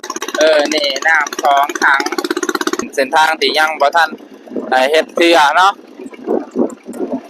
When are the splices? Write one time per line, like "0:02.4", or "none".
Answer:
0:02.9

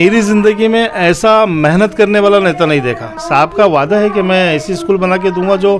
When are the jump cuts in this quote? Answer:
0:03.1

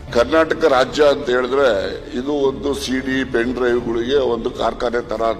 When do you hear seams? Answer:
none

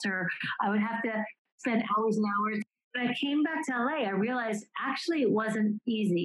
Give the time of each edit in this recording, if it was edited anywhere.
0:01.5
0:02.8

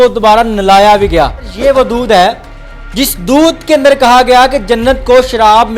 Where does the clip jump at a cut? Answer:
0:01.5

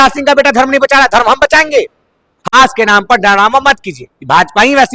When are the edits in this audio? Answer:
0:02.5

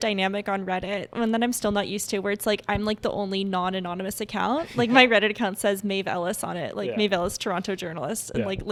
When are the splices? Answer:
none

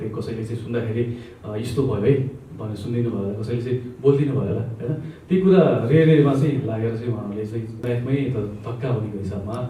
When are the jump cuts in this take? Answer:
0:07.8

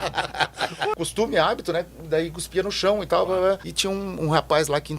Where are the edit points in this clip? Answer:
0:00.9
0:03.7

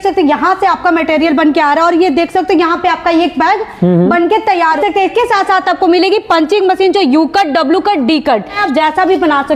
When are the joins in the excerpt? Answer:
0:04.8
0:08.6

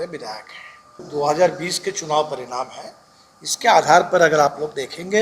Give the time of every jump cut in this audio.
0:01.0

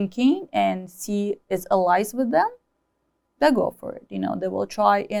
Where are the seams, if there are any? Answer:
none

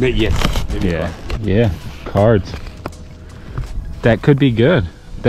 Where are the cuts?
0:01.3

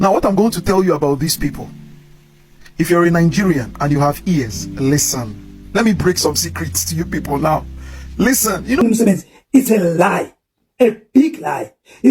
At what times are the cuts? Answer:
0:08.8

